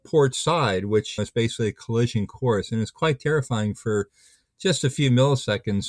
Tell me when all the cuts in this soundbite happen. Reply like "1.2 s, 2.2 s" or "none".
1.2 s